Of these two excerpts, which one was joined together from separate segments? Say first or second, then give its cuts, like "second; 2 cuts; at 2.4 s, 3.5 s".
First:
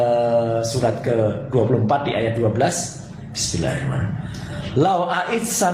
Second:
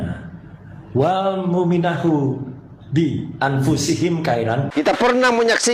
second; 1 cut; at 4.7 s